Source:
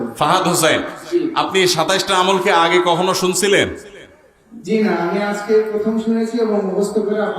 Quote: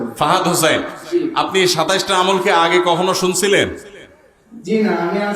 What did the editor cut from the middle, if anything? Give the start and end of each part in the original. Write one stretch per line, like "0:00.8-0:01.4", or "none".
none